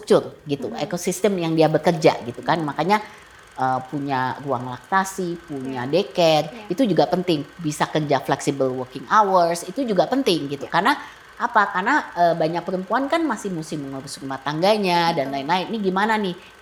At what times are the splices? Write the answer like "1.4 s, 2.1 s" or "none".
none